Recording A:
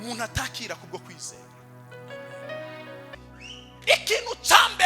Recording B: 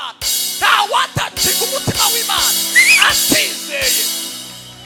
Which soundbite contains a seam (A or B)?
A